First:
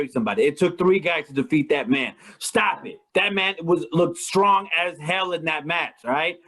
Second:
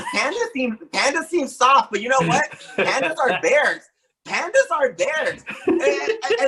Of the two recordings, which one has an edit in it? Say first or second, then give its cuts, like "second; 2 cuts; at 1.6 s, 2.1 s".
first; 1 cut; at 3.0 s